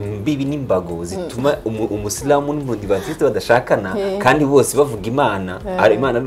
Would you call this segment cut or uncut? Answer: uncut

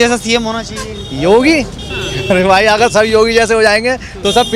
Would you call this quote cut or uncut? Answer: uncut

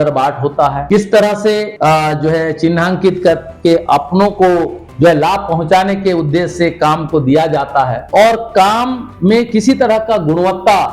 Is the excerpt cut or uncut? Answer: uncut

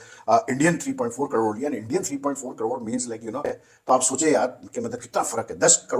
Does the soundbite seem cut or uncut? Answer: cut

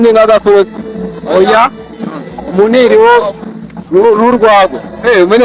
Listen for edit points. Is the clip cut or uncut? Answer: uncut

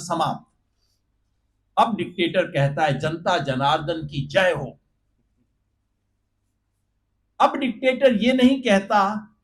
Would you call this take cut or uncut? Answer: uncut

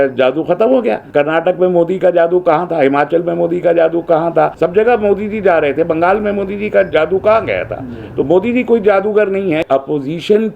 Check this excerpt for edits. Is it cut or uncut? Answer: cut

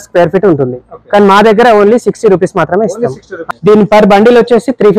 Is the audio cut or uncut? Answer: cut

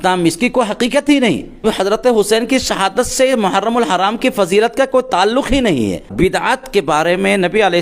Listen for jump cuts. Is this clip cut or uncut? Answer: cut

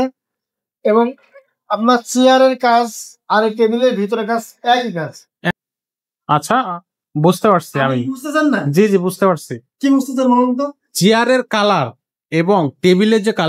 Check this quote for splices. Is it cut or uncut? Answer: cut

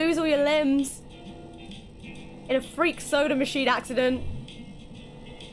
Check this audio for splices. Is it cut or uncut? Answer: uncut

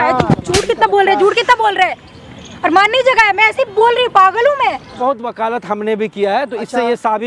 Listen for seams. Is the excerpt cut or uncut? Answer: cut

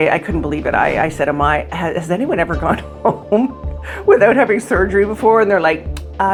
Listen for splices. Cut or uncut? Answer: uncut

